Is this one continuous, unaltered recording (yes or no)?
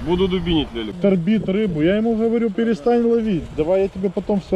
no